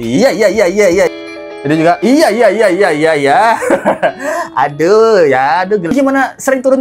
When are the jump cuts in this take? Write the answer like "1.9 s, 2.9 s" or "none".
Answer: 1.1 s, 5.9 s